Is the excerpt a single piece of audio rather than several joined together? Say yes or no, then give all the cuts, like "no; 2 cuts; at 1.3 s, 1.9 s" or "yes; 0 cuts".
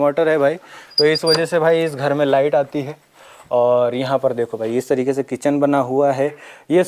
yes; 0 cuts